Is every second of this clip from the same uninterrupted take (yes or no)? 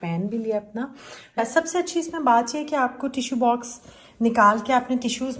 no